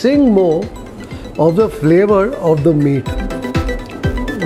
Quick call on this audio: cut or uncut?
uncut